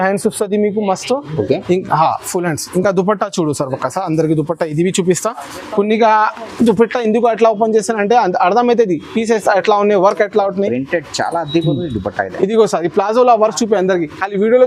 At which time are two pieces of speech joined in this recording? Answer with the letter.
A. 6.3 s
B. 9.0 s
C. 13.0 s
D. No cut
D